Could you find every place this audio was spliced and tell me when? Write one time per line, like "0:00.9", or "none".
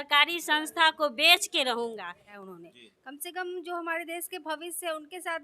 0:02.4